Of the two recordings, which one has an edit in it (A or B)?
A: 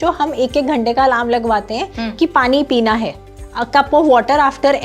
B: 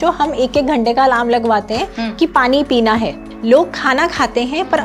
B